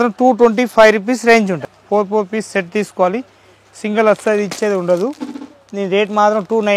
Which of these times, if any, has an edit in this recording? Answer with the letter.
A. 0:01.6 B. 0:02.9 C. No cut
A